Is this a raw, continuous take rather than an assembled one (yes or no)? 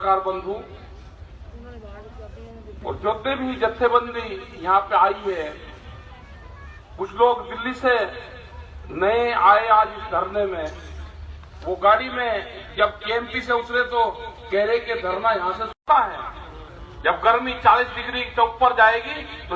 no